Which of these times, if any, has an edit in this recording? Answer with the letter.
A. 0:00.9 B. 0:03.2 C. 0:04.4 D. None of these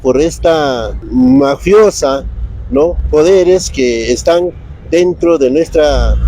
A